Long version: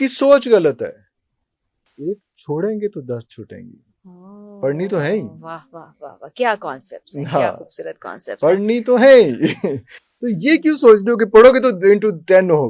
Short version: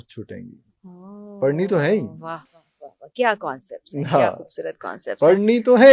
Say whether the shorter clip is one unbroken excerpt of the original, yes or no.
yes